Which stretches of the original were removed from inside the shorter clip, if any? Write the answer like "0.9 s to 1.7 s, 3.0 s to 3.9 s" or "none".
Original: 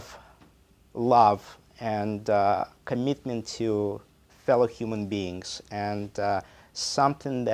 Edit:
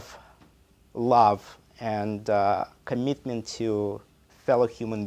none